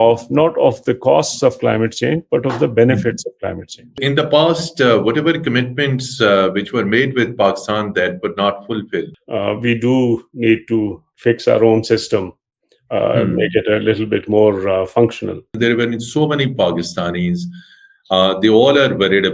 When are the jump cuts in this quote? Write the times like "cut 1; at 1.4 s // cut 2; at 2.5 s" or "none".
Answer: cut 1; at 4.0 s // cut 2; at 9.2 s // cut 3; at 15.6 s